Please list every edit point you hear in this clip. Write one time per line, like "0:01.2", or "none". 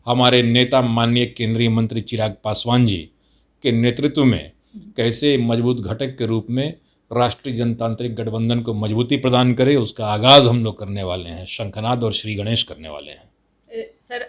none